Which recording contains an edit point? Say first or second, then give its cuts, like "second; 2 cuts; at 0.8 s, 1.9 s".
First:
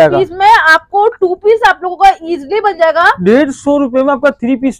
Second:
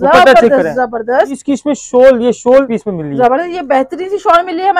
second; 2 cuts; at 1.4 s, 2.7 s